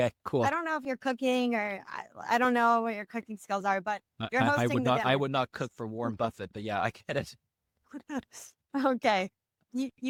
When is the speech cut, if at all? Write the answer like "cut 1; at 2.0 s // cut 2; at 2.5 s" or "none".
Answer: none